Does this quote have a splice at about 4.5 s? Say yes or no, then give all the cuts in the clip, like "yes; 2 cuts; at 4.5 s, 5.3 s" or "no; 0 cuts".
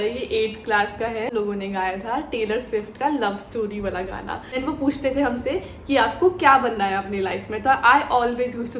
yes; 2 cuts; at 1.3 s, 4.5 s